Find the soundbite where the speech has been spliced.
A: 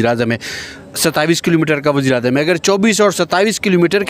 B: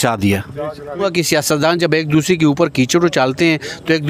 B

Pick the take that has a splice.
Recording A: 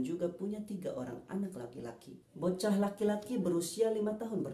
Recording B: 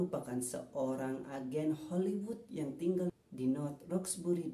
A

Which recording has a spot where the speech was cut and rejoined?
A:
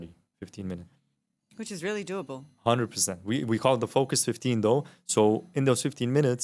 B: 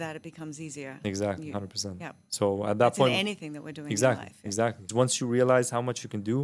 B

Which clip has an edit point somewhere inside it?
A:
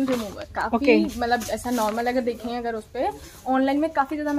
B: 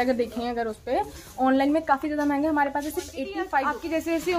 B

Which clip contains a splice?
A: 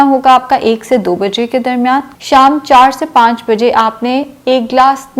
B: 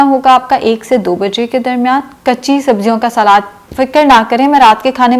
A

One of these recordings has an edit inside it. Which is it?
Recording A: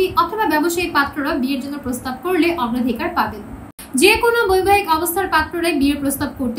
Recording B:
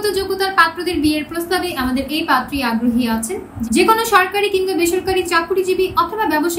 A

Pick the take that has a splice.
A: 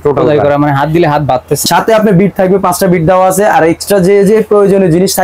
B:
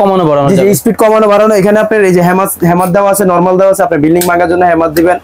A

